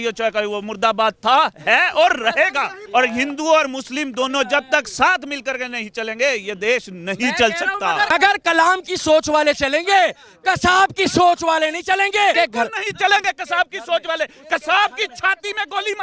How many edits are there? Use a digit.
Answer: 3